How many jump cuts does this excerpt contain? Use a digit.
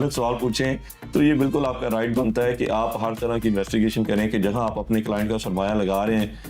0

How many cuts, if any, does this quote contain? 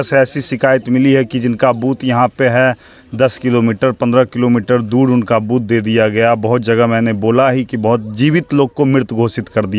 0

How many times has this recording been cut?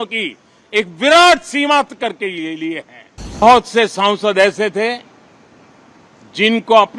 1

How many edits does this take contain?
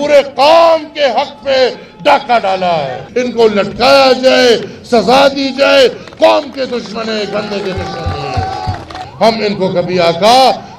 2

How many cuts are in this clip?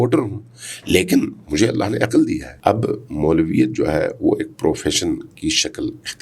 1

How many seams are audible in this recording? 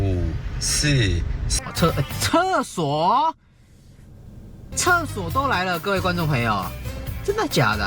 1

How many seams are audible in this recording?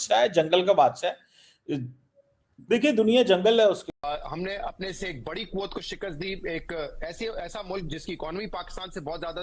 1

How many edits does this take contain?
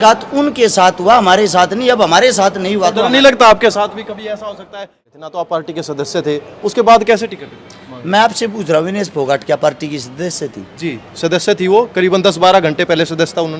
1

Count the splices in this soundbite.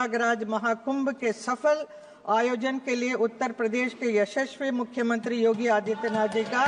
0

